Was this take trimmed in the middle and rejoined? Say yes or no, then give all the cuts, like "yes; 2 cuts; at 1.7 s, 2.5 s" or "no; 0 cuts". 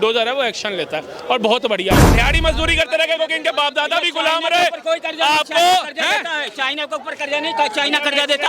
yes; 1 cut; at 2.1 s